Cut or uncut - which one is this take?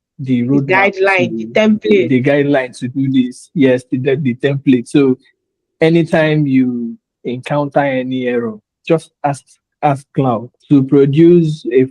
cut